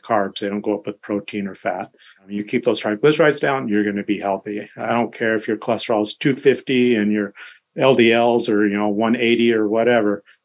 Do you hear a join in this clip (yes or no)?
yes